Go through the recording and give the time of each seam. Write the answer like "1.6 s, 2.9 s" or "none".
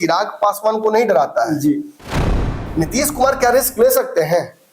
2.3 s